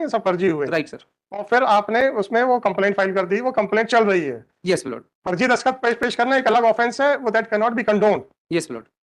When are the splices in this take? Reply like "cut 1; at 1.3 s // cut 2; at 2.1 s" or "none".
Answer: none